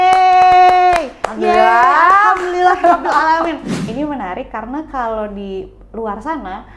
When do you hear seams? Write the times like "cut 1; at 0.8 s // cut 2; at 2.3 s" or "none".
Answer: cut 1; at 3.7 s